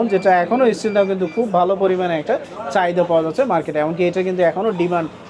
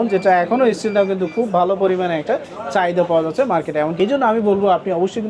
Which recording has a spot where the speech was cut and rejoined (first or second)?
second